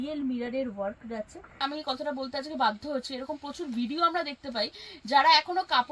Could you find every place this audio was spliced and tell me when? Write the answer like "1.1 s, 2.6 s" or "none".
1.6 s